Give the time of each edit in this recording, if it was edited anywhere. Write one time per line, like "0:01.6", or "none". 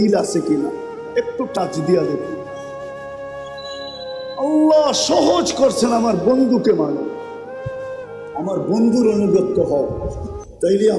0:07.1
0:08.3